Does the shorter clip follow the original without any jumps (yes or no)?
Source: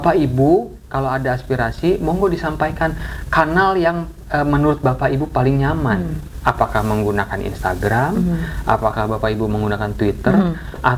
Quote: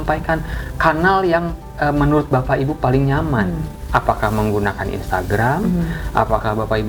yes